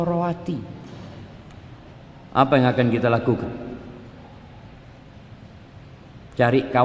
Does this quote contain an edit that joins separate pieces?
yes; 1 cut; at 1.9 s

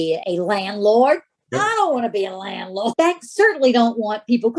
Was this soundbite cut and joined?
yes; 1 cut; at 2.9 s

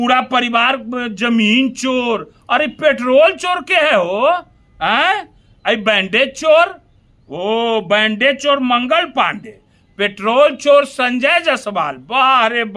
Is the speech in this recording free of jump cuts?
yes; 0 cuts

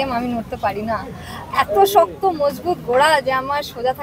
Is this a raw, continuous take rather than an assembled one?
yes; 0 cuts

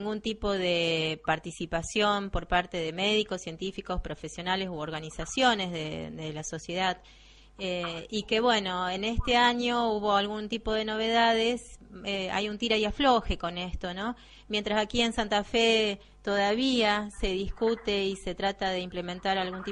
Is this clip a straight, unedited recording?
yes; 0 cuts

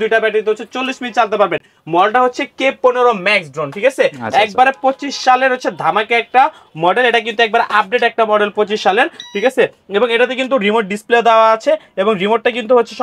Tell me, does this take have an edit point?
no; 0 cuts

